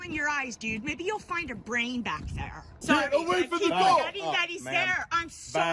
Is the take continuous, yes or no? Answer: no